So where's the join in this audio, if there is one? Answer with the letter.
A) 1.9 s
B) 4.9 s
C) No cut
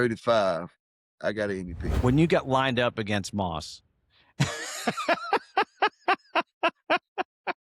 A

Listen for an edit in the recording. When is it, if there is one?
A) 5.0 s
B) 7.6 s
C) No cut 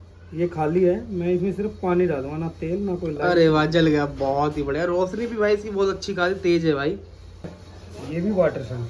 B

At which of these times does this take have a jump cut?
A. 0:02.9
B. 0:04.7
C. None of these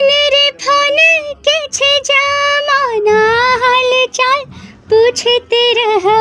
C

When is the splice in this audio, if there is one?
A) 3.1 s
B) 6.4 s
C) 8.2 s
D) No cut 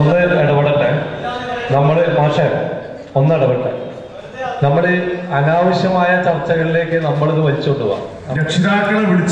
C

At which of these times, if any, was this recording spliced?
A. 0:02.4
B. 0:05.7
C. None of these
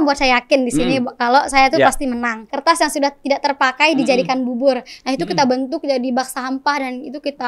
A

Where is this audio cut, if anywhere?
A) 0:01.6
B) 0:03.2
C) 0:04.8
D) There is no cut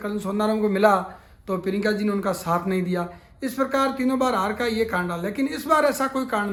D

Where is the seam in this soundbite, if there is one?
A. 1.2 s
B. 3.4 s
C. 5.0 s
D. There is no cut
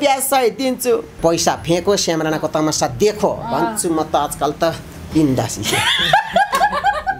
A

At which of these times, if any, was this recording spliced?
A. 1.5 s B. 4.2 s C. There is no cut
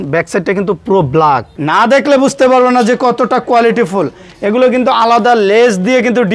A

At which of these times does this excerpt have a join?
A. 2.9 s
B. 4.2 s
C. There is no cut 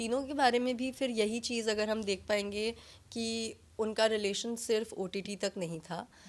C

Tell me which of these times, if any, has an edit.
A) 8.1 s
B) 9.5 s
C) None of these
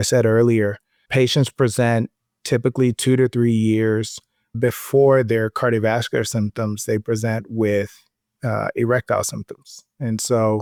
C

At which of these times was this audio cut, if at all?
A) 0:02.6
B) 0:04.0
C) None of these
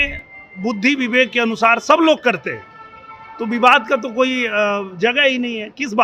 C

